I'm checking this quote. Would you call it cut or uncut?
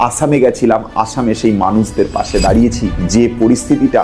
cut